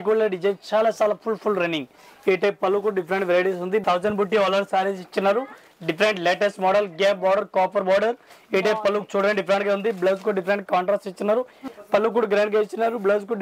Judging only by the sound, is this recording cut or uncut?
cut